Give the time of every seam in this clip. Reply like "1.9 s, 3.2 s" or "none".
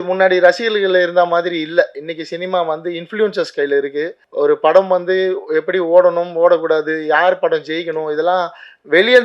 4.2 s